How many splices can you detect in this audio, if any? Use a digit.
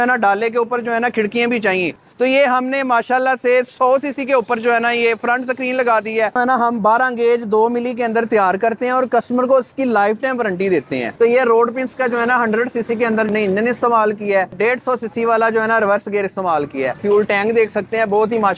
5